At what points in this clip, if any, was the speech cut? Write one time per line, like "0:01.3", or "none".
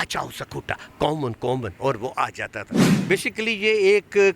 0:02.8